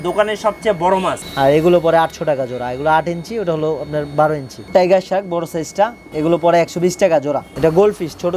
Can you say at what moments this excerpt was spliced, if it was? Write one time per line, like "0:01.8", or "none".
0:01.2
0:04.6
0:06.0
0:07.5